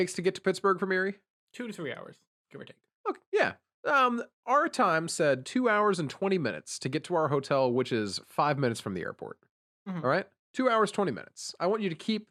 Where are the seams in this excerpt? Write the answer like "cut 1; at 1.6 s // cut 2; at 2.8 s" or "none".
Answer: none